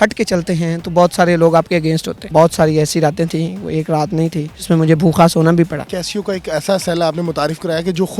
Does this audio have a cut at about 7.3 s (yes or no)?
no